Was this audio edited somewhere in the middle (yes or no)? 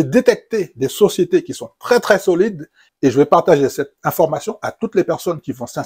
no